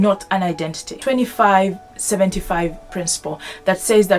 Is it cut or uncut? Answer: cut